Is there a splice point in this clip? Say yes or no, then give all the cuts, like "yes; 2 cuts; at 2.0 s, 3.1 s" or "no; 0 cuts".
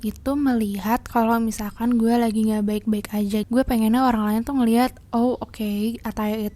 no; 0 cuts